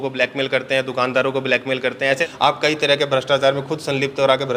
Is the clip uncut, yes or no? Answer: no